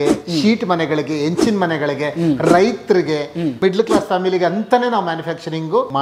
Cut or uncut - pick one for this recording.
uncut